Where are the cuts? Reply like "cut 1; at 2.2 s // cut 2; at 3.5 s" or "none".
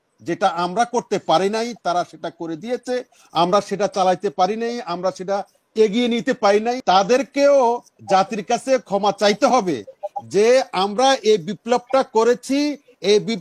cut 1; at 6.8 s